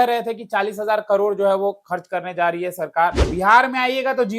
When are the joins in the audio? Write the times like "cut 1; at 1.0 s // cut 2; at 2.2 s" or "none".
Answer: cut 1; at 3.3 s